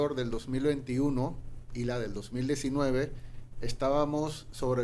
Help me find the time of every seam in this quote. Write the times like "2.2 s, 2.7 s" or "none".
none